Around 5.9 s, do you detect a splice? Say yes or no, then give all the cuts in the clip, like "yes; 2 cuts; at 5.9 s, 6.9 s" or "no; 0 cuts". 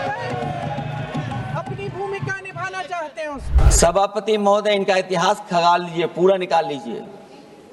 no; 1 cut; at 3.6 s